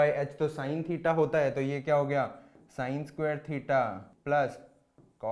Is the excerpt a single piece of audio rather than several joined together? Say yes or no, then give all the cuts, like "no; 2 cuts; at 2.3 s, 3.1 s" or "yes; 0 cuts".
no; 1 cut; at 4.1 s